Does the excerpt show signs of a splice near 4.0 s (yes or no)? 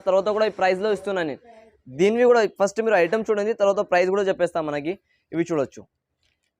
no